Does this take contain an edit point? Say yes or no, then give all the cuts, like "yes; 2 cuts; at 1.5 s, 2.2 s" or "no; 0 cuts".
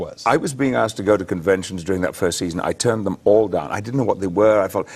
no; 0 cuts